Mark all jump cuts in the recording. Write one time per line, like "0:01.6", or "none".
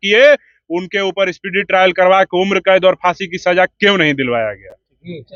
none

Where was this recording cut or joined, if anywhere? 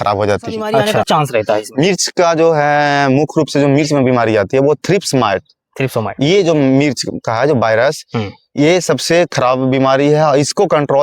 0:00.9

